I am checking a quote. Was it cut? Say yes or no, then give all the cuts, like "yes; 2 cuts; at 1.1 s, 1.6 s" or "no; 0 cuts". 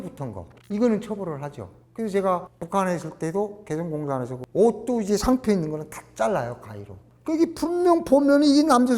yes; 1 cut; at 4.4 s